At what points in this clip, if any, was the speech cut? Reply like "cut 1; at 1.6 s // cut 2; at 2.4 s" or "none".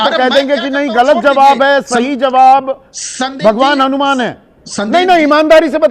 none